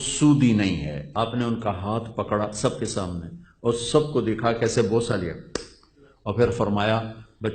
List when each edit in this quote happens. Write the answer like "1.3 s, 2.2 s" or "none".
1.0 s